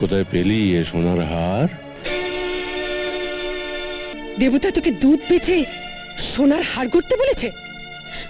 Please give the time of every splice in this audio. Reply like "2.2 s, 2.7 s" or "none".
4.1 s